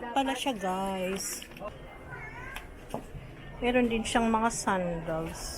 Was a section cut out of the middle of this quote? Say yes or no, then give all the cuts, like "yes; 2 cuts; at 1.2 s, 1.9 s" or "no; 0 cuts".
yes; 1 cut; at 1.7 s